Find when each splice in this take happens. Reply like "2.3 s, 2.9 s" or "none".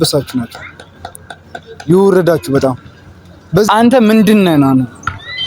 3.7 s